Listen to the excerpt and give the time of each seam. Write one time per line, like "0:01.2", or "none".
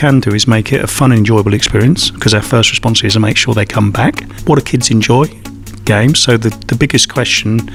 0:04.3